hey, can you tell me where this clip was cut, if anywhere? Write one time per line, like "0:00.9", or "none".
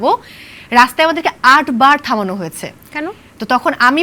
none